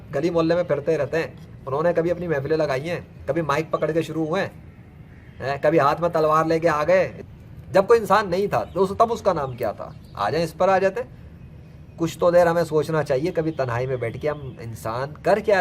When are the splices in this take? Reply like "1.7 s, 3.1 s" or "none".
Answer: 7.2 s